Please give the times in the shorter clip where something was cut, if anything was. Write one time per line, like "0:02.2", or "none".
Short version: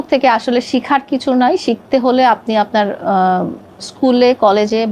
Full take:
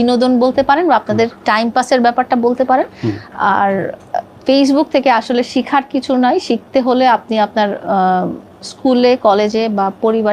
none